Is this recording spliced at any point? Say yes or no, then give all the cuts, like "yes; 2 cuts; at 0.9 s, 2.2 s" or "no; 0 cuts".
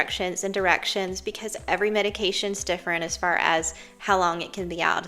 no; 0 cuts